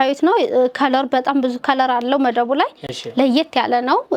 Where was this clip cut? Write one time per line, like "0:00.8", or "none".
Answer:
none